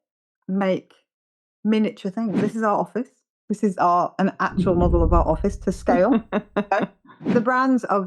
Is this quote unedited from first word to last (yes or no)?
no